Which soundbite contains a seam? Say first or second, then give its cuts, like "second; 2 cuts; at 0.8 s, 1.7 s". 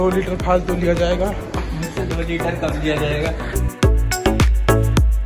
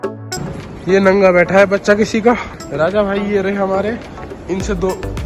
second; 1 cut; at 2.5 s